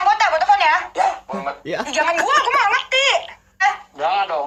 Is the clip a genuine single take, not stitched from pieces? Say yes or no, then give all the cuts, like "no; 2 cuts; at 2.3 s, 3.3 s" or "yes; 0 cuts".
yes; 0 cuts